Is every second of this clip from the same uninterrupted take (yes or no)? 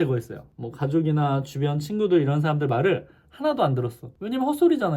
yes